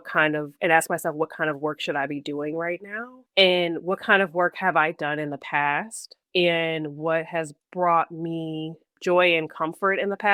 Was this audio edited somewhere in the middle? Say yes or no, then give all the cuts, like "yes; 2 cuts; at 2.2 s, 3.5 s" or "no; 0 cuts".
no; 0 cuts